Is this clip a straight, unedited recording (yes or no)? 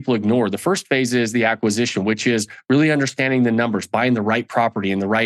yes